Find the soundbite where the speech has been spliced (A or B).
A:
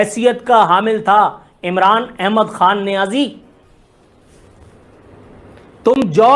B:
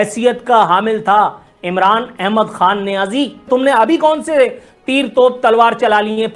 B